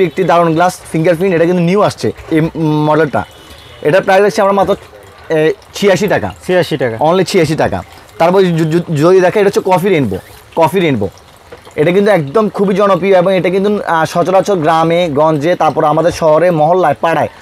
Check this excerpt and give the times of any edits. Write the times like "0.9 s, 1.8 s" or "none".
none